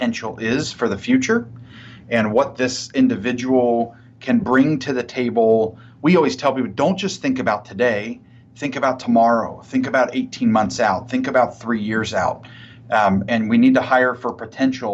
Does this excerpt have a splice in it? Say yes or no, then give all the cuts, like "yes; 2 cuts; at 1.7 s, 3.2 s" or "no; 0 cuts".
no; 0 cuts